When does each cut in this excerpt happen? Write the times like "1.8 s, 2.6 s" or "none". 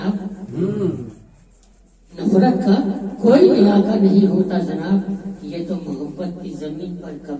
none